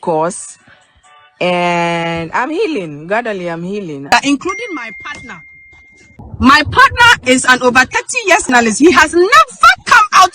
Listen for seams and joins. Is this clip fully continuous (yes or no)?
no